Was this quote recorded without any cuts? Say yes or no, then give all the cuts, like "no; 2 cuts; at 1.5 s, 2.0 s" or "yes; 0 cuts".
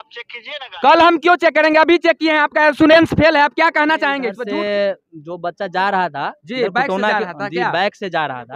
no; 1 cut; at 4.3 s